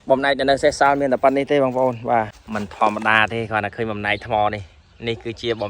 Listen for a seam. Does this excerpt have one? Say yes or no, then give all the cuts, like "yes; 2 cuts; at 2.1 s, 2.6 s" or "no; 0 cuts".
yes; 1 cut; at 2.4 s